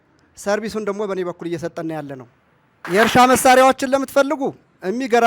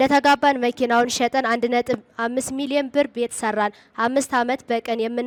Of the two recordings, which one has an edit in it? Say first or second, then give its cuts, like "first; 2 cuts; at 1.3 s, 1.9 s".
first; 1 cut; at 2.8 s